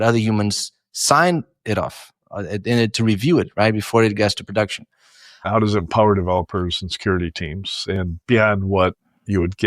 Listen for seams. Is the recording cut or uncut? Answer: cut